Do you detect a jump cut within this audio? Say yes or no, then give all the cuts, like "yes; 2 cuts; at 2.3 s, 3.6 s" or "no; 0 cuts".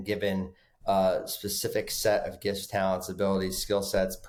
no; 0 cuts